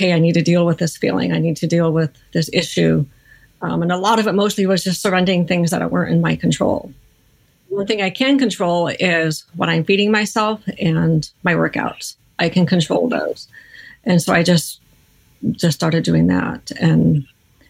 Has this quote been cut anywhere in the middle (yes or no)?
no